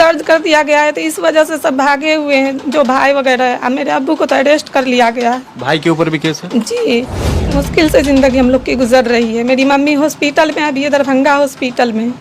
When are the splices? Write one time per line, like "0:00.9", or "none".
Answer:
0:07.6